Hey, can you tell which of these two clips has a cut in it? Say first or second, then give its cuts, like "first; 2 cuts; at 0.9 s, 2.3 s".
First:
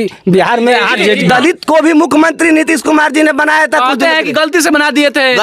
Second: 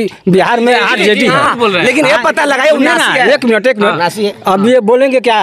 first; 1 cut; at 1.2 s